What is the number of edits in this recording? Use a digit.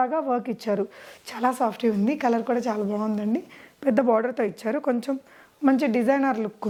0